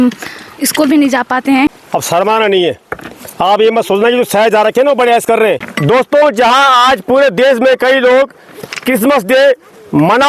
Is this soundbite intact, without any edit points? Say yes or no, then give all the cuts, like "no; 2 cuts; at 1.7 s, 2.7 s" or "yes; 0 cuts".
no; 2 cuts; at 1.8 s, 5.7 s